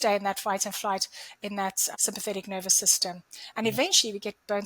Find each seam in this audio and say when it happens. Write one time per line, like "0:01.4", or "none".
0:01.9